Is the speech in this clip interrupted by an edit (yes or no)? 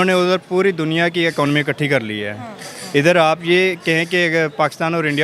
no